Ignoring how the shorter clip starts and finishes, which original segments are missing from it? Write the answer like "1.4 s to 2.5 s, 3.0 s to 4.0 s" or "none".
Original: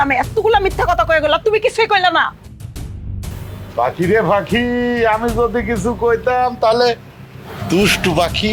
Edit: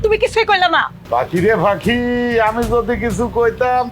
2.4 s to 3.6 s